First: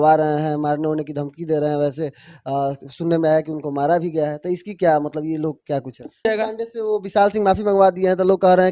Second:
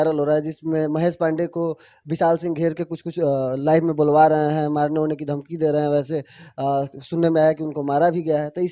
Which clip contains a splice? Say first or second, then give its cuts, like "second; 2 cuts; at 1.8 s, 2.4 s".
first; 1 cut; at 6.2 s